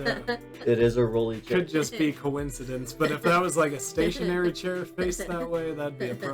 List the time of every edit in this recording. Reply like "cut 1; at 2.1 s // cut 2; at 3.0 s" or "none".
none

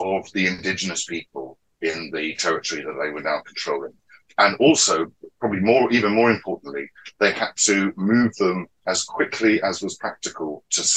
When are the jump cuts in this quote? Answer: none

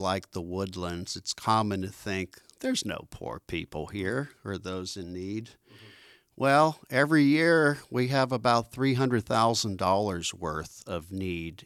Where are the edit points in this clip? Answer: none

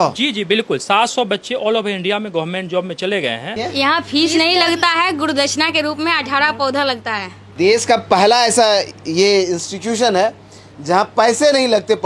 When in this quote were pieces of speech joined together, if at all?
cut 1; at 3.5 s // cut 2; at 7.4 s

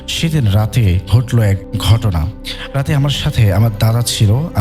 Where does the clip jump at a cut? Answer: cut 1; at 1.7 s

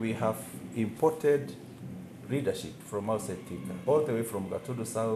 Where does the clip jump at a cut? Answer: none

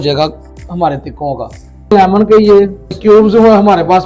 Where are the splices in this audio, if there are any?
cut 1; at 1.9 s // cut 2; at 3.0 s

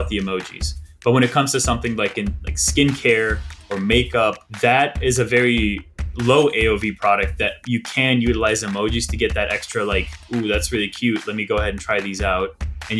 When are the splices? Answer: cut 1; at 4.5 s // cut 2; at 10.2 s

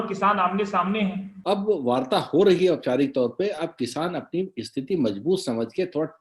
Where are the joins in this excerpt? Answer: cut 1; at 1.4 s

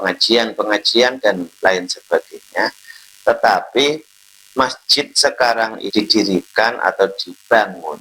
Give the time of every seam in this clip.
cut 1; at 5.8 s

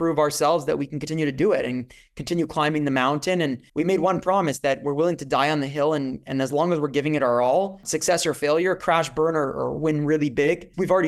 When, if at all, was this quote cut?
none

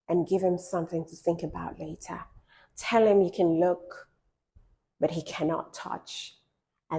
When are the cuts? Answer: none

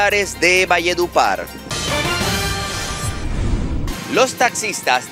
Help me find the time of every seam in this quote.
cut 1; at 1.6 s // cut 2; at 3.8 s

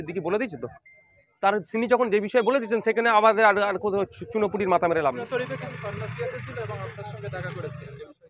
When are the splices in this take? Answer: cut 1; at 5.2 s

